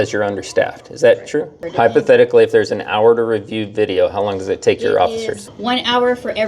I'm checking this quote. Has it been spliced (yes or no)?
yes